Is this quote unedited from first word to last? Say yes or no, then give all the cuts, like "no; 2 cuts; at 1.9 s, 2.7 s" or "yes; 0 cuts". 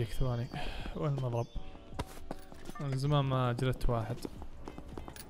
yes; 0 cuts